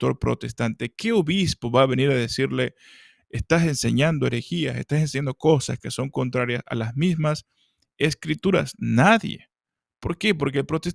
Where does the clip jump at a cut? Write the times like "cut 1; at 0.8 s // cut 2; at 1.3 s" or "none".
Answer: none